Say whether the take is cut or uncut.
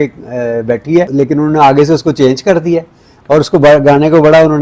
cut